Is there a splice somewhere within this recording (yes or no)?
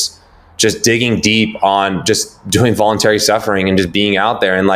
no